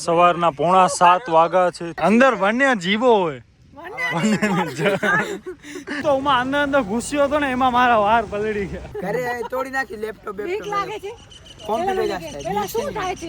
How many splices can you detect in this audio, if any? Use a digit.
3